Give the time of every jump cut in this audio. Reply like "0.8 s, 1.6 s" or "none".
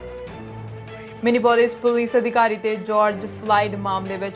1.1 s